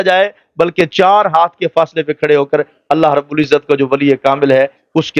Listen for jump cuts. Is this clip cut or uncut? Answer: uncut